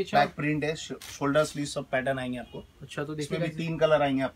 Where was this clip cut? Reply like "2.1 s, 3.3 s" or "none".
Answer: none